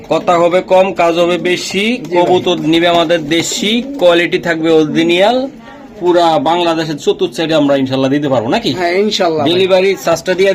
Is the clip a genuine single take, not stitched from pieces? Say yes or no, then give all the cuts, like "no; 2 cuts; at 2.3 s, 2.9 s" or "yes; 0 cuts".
yes; 0 cuts